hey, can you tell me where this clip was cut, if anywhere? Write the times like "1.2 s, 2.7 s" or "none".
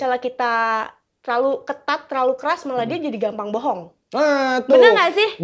none